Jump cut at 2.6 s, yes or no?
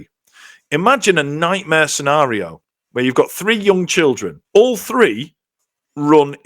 no